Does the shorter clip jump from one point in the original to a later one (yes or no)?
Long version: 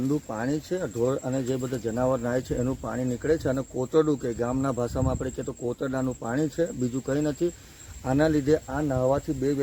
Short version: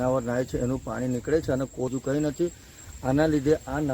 yes